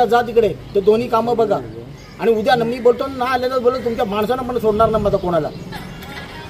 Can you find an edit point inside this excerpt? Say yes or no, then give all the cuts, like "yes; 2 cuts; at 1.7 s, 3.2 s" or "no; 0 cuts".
no; 0 cuts